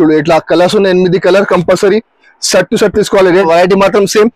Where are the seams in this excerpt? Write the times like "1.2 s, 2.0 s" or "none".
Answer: 3.4 s